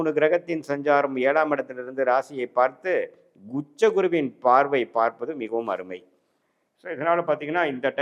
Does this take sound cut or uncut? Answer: uncut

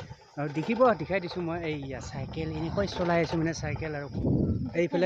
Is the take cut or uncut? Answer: cut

